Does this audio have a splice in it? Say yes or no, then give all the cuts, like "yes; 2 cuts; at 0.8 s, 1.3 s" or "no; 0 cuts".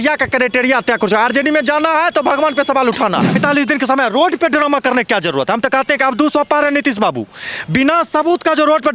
yes; 1 cut; at 3.4 s